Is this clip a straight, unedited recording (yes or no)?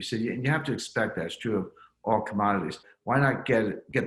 no